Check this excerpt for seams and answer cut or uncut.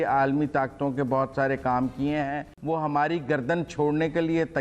cut